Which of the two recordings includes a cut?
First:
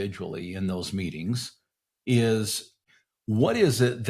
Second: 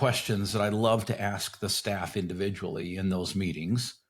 first; 1 cut; at 2.9 s

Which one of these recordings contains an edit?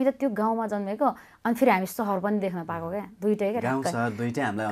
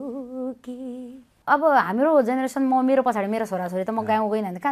second; 1 cut; at 1.3 s

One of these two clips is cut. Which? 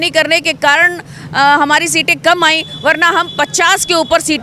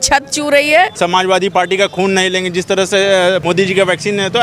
second; 2 cuts; at 0.9 s, 3.4 s

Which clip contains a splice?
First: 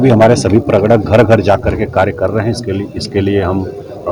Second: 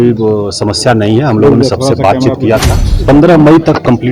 second; 1 cut; at 3.0 s

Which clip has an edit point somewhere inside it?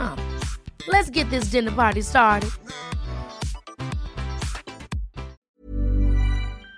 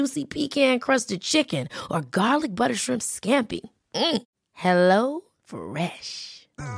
first; 1 cut; at 5.4 s

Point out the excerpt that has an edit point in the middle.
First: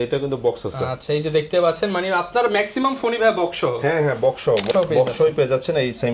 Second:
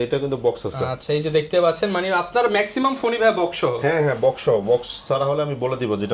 first; 1 cut; at 4.7 s

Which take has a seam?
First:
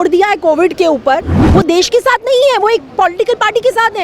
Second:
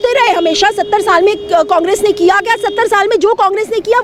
first; 1 cut; at 1.4 s

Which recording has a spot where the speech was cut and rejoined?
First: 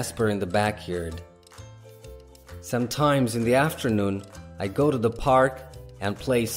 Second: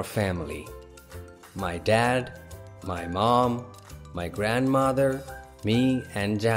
first; 2 cuts; at 1.2 s, 2.7 s

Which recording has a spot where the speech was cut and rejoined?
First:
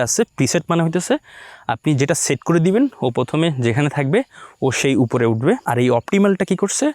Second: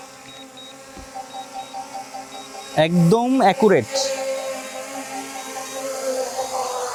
first; 1 cut; at 5.6 s

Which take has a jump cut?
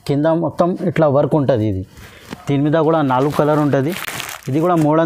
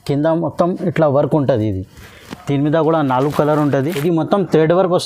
second; 1 cut; at 3.9 s

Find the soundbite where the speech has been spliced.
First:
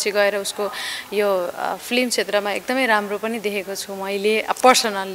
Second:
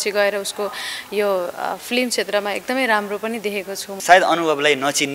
second; 1 cut; at 3.9 s

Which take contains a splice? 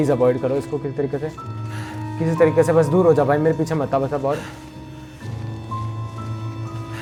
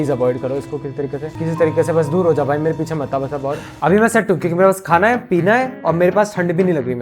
second; 2 cuts; at 1.3 s, 3.7 s

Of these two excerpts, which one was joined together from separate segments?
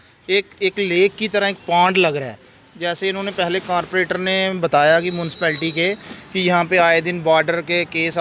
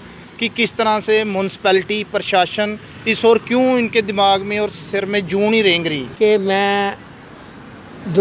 second; 1 cut; at 6.0 s

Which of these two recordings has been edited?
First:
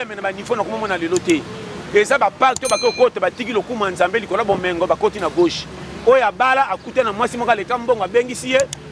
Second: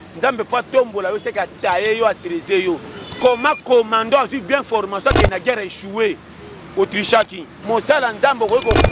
second; 1 cut; at 7.5 s

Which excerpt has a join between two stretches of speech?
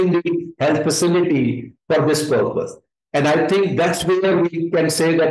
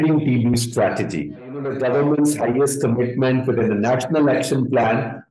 second; 1 cut; at 1.7 s

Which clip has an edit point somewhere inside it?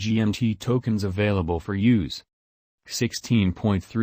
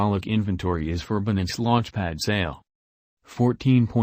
second; 1 cut; at 1.0 s

